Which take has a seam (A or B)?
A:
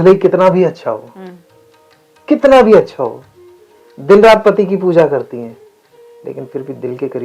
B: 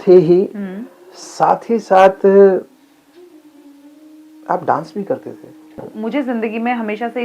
B